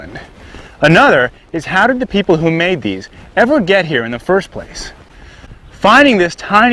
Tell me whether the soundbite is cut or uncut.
cut